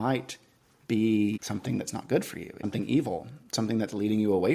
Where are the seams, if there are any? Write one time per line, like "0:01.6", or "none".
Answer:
0:01.4
0:02.6

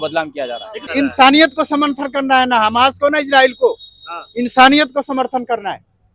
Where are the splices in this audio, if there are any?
0:00.9

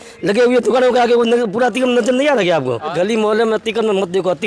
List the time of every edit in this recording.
0:02.9

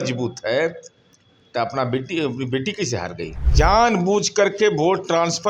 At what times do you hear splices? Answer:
0:03.4

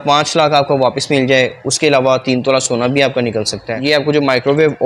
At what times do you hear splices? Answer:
0:03.8

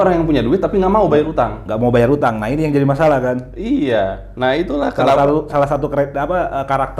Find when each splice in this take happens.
none

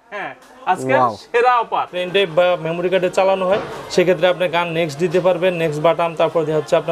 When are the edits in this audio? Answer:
0:02.0

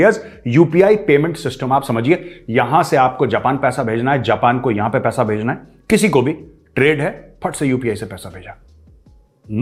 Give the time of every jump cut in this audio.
none

